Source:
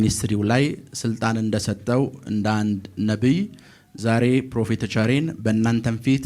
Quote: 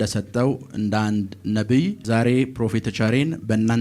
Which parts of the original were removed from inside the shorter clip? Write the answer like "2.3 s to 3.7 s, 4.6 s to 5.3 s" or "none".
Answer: 3.5 s to 3.9 s

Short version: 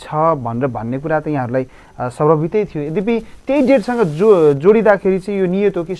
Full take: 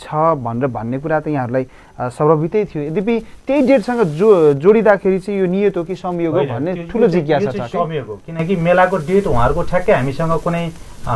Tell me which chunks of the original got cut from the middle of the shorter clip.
none

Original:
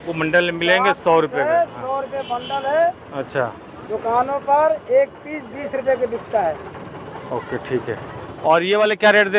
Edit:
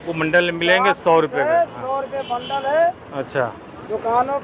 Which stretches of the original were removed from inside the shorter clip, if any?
none

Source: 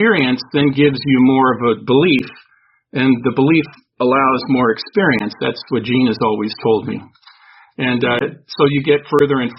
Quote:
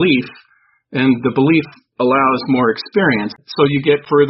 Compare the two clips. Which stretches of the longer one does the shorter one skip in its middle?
5.4 s to 8.4 s

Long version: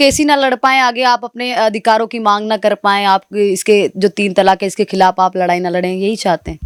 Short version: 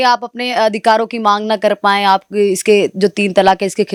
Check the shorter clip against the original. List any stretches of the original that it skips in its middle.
none

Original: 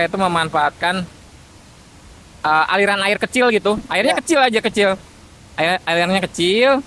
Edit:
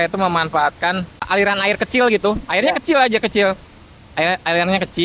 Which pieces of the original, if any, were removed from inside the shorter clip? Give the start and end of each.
1.3 s to 2.7 s

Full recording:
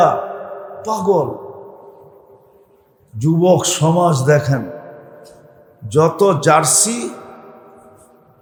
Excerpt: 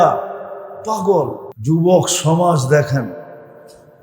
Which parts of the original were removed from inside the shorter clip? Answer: 1.5 s to 3.0 s

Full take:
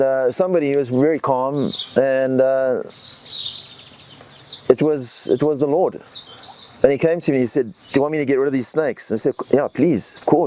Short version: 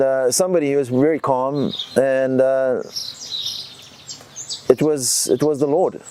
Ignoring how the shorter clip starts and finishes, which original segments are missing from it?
none

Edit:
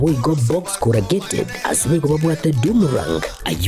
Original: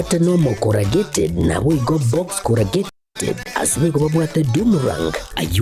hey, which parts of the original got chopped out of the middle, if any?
3.1 s to 3.4 s

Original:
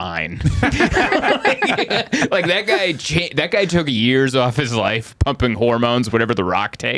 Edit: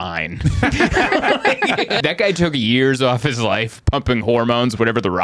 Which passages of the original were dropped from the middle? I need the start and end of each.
2.0 s to 3.3 s

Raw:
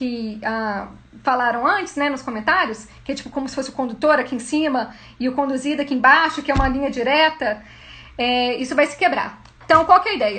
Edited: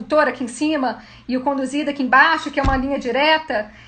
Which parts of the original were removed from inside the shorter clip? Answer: none

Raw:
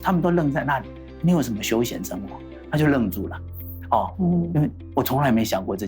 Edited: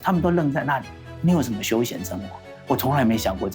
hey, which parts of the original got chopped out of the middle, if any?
2.5 s to 4.8 s

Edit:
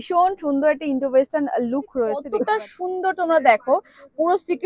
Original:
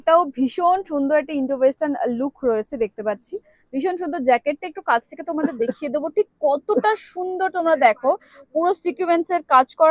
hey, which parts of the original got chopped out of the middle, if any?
2.7 s to 6.6 s

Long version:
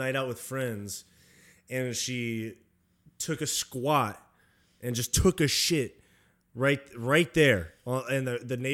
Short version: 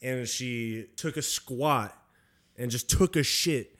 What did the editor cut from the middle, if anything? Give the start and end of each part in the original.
2.6 s to 3.1 s

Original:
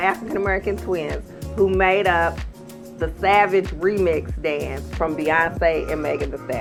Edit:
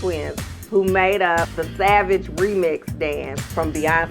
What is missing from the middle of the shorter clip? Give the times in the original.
2.4 s to 3.0 s

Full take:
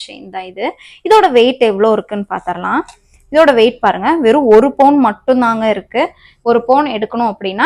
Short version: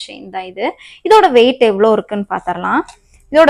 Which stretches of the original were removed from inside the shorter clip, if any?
none

